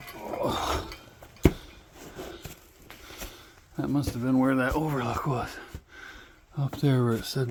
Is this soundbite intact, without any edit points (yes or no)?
yes